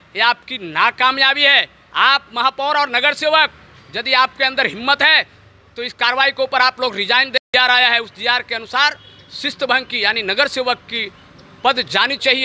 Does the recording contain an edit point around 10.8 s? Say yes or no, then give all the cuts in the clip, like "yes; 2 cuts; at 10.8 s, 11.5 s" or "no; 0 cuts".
no; 1 cut; at 7.3 s